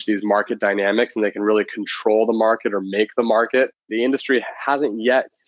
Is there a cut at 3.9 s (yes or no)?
yes